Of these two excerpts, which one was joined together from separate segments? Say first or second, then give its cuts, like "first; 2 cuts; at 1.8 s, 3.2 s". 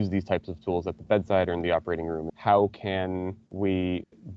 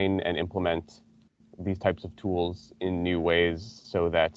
first; 2 cuts; at 2.3 s, 3.4 s